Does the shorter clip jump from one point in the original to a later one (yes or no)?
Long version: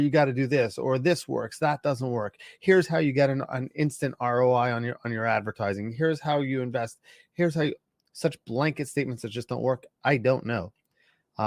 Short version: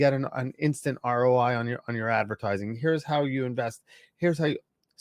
no